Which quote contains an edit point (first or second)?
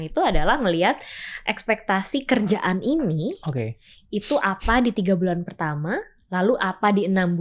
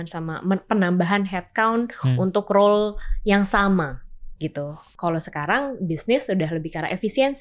second